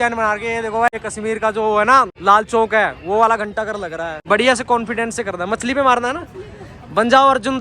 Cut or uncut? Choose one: cut